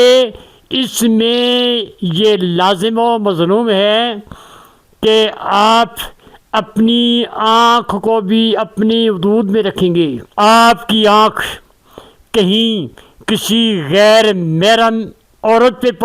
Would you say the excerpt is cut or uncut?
cut